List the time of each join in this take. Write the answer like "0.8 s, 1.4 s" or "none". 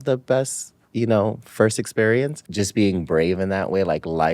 2.4 s